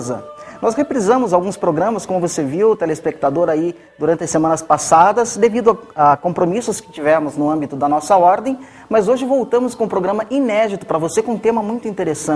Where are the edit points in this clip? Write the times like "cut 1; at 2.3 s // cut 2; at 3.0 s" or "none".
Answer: none

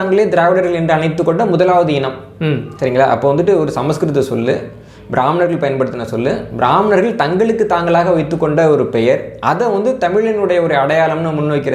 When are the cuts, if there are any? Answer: none

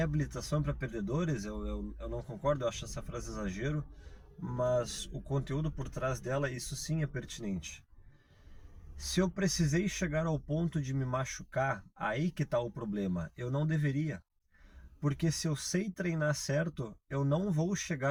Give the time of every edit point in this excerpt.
none

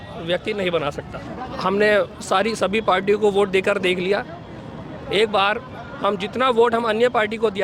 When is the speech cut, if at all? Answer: cut 1; at 1.3 s

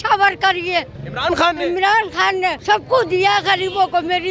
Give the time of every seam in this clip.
cut 1; at 1.0 s // cut 2; at 2.6 s

